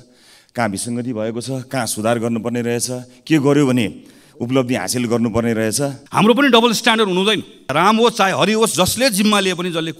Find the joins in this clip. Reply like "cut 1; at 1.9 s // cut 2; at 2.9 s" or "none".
cut 1; at 6.0 s // cut 2; at 7.7 s